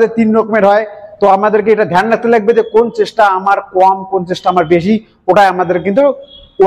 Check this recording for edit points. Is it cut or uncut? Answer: uncut